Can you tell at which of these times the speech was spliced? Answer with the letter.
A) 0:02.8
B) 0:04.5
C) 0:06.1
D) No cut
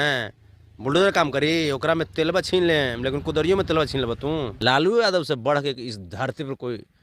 B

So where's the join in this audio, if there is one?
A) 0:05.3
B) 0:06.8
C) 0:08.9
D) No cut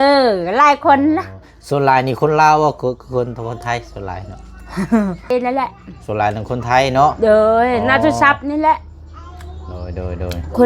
A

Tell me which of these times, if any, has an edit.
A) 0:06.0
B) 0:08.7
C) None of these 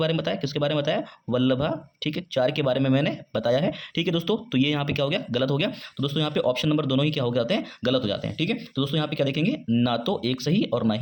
C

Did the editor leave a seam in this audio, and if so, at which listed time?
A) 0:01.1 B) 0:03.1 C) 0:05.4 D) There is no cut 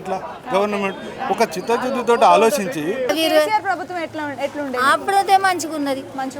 B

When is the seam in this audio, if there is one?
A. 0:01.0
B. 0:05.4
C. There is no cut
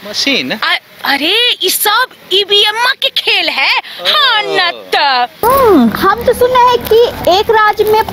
B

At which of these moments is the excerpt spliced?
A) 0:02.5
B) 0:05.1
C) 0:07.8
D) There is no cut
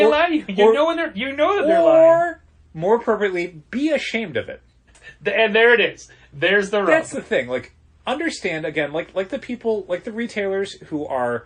B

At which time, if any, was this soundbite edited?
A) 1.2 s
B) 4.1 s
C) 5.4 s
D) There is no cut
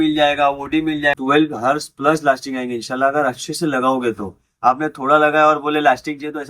A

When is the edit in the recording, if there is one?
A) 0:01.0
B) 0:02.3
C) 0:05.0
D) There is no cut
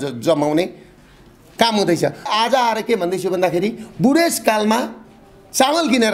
B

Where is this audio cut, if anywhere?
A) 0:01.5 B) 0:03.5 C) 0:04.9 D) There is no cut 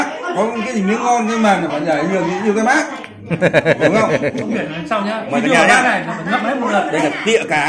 D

